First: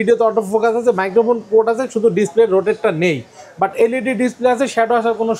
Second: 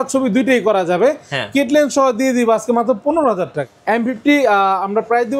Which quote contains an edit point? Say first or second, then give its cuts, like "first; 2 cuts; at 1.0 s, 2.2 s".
second; 1 cut; at 3.6 s